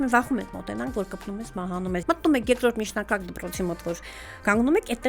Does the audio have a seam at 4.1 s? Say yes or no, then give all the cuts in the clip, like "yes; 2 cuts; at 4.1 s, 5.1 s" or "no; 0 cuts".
no; 1 cut; at 2.0 s